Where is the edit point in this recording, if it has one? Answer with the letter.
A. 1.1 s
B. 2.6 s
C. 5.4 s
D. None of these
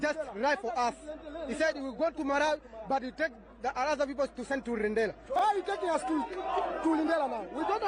C